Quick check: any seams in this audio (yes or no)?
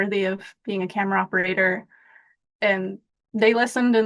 no